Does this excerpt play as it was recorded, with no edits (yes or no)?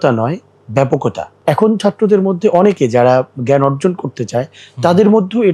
no